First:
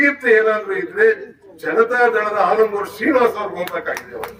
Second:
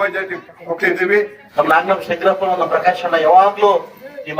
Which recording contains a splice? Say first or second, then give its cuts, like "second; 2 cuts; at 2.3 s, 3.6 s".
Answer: second; 1 cut; at 1.4 s